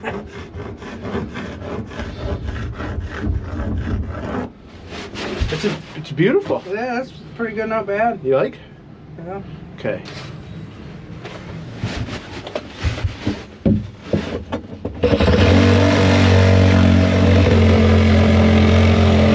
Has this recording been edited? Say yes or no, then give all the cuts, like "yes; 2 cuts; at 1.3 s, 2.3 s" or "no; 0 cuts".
no; 0 cuts